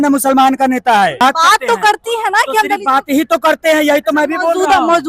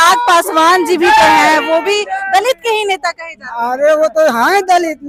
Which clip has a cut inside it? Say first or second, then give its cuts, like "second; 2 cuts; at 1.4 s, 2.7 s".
first; 1 cut; at 1.2 s